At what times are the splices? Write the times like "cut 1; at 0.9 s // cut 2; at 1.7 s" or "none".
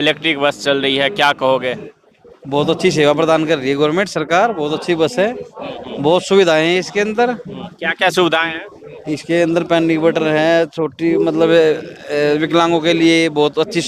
none